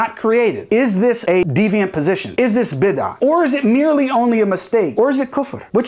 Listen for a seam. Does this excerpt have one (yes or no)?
yes